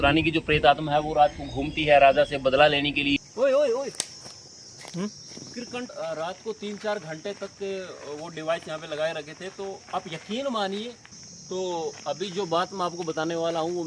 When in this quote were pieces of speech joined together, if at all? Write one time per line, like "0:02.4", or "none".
0:03.2
0:05.9
0:11.7